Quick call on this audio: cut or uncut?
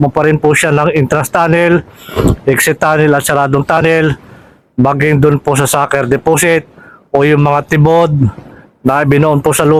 uncut